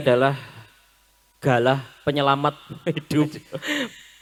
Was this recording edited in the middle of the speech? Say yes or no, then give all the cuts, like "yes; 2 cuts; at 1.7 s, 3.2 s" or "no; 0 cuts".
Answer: no; 0 cuts